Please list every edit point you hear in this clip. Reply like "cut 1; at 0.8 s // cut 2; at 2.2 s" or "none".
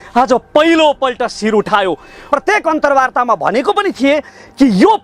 cut 1; at 2.3 s